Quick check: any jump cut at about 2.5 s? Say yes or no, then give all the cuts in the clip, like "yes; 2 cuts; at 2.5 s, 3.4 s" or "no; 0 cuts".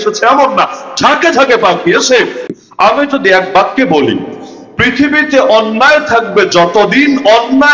yes; 1 cut; at 2.5 s